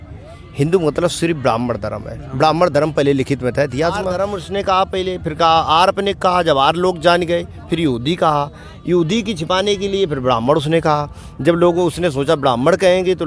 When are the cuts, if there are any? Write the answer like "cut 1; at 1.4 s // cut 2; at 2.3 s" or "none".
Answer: cut 1; at 4.2 s